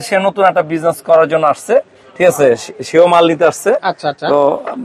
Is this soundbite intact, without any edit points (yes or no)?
yes